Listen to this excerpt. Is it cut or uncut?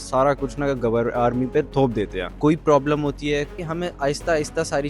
cut